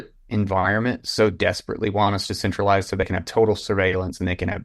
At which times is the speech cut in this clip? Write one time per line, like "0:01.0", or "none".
0:03.1